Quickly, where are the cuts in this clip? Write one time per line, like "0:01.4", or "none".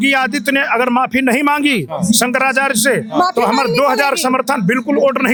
none